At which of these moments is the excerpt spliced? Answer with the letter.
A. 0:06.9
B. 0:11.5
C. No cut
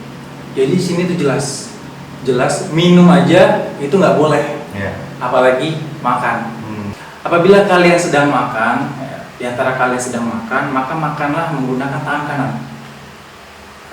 A